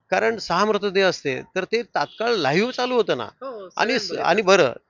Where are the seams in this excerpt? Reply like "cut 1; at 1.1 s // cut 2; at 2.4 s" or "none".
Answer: none